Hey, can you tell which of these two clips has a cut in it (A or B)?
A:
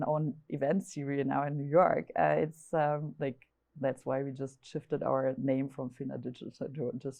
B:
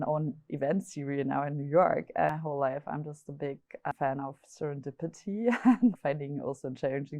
B